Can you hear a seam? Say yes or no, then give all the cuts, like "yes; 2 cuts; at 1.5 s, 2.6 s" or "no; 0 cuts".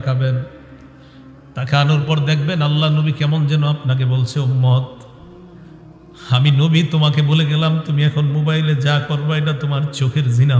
no; 0 cuts